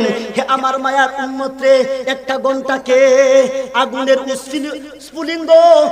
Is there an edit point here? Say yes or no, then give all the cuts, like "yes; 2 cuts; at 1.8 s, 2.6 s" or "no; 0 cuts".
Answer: yes; 1 cut; at 4.8 s